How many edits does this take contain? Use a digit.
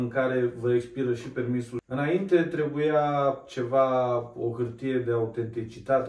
1